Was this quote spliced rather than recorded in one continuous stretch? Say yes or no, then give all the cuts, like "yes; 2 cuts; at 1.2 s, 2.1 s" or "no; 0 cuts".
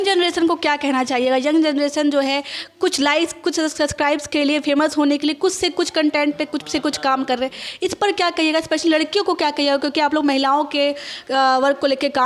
no; 0 cuts